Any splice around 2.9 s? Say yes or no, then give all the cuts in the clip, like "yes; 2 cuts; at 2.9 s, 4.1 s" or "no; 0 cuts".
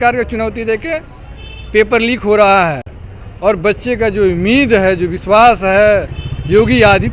no; 0 cuts